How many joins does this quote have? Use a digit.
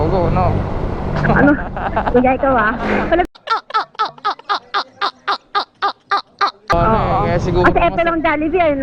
1